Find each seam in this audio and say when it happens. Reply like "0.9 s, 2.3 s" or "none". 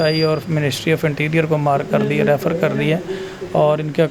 none